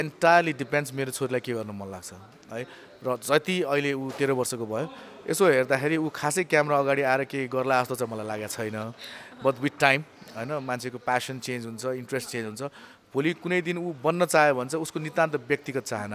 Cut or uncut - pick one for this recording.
uncut